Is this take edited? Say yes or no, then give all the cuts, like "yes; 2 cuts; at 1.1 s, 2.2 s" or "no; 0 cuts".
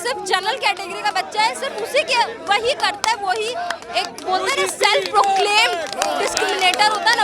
no; 0 cuts